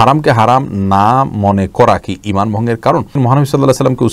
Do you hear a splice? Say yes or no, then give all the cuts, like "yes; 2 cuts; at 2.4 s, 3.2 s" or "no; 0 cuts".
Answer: yes; 1 cut; at 3.1 s